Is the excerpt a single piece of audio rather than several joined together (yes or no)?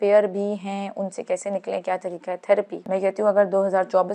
no